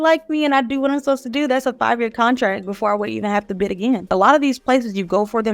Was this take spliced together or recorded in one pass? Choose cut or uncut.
cut